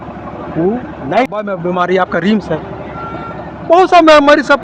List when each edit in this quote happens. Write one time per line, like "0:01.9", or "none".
0:01.3